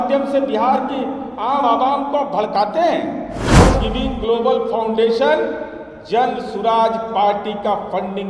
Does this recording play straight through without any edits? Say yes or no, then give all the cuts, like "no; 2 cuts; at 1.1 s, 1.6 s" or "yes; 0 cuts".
no; 1 cut; at 3.4 s